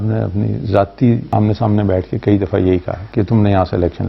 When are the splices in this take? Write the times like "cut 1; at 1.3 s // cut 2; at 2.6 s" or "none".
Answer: cut 1; at 1.2 s